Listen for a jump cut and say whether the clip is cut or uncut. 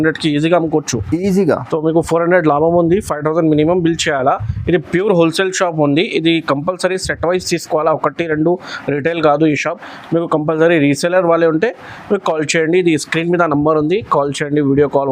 uncut